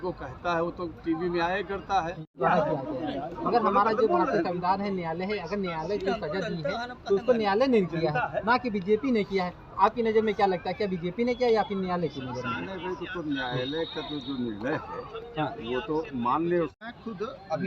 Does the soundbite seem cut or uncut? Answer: cut